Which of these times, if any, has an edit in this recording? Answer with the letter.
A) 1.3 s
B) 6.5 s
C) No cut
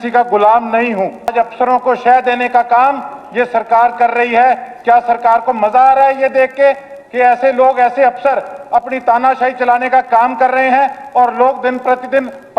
A